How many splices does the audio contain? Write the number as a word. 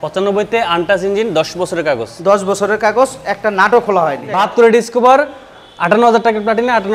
one